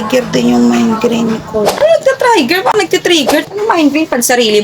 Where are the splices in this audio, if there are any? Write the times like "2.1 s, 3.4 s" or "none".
3.5 s